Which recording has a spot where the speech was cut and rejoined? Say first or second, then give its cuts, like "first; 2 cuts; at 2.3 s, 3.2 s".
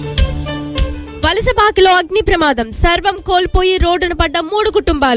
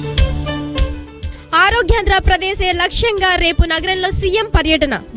first; 1 cut; at 1.0 s